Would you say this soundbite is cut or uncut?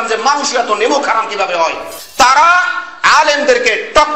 cut